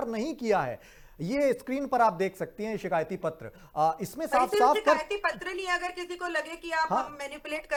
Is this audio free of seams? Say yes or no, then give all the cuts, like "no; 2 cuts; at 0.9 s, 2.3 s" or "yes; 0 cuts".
yes; 0 cuts